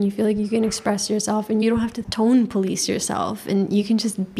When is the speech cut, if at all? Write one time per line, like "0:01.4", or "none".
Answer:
0:01.6